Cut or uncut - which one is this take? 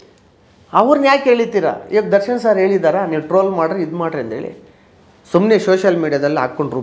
uncut